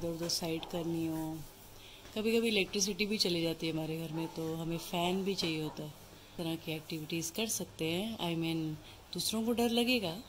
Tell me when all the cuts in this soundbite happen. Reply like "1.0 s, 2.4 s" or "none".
6.3 s